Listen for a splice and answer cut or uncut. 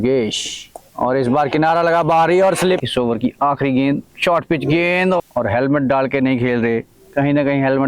cut